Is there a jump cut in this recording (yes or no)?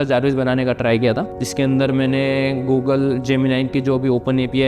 no